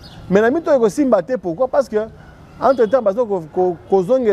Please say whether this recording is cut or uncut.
uncut